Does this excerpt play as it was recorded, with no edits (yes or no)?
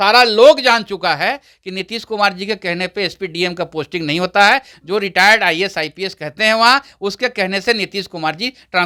yes